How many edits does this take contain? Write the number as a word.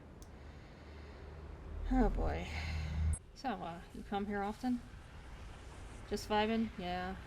one